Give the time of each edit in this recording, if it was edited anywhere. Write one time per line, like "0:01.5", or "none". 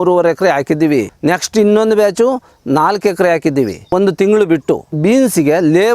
0:01.1
0:03.9
0:05.0

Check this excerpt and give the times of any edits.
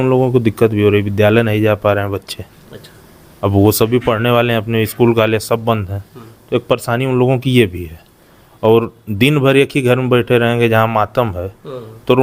none

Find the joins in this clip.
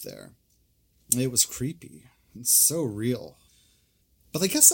0:03.5

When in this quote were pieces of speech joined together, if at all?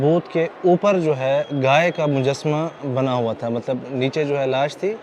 none

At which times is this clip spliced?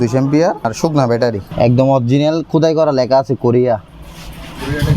0:00.9

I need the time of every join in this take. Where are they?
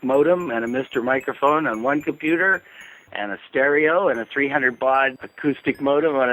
0:05.3

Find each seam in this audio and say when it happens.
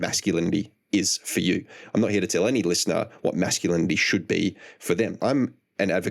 0:05.2

